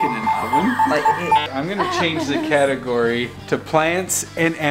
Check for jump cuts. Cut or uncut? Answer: cut